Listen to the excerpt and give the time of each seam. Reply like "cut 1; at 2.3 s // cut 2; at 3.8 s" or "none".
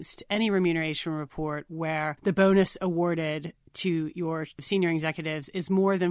cut 1; at 2.2 s // cut 2; at 4.6 s